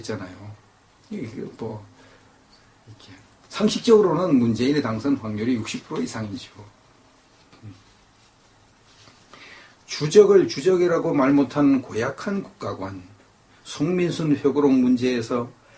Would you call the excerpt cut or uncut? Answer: uncut